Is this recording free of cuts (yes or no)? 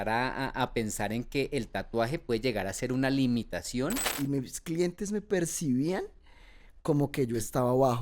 no